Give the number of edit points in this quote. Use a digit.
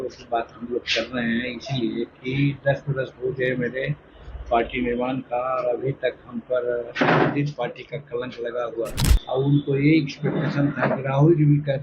1